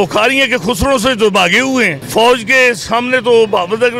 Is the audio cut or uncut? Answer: cut